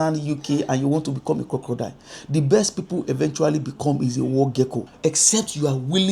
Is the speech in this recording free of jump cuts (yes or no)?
no